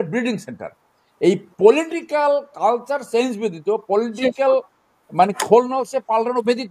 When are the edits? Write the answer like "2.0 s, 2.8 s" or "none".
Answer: none